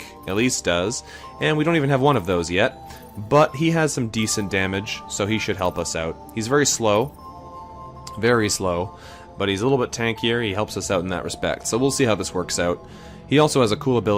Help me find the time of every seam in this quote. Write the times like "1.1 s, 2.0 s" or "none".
none